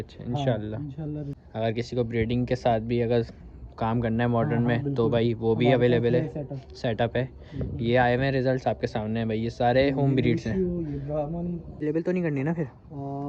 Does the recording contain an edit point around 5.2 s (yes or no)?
no